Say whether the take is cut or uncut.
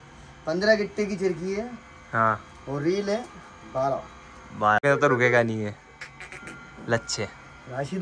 cut